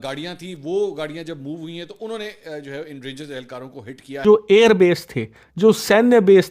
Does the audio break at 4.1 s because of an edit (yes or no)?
yes